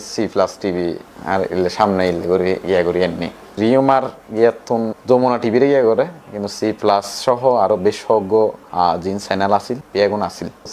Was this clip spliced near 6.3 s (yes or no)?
no